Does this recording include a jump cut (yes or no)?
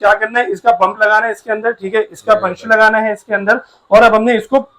no